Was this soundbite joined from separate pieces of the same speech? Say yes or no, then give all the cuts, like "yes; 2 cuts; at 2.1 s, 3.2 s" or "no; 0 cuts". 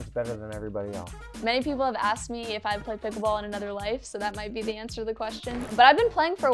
yes; 2 cuts; at 1.3 s, 5.7 s